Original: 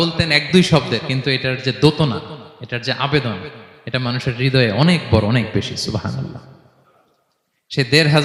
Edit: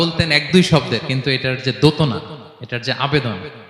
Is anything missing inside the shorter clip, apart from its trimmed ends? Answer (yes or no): no